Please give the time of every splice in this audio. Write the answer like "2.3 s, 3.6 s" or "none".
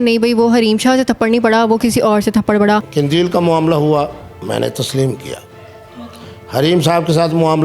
2.8 s